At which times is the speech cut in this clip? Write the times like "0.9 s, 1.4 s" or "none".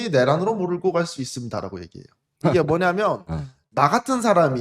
3.6 s

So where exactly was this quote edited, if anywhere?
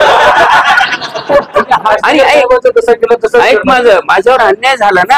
1.9 s

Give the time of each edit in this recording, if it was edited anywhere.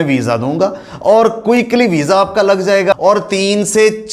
2.9 s

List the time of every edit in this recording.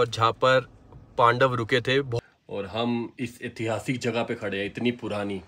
2.1 s

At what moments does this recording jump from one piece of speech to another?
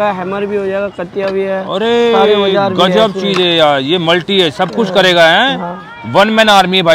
none

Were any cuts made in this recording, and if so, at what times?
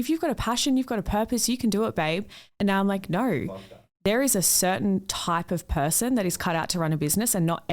none

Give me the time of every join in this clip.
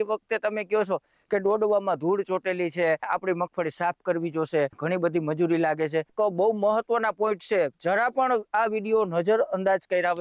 3.0 s, 4.8 s, 6.1 s

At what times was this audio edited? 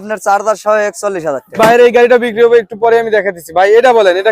1.6 s

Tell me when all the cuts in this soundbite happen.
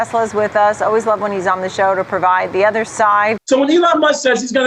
3.4 s

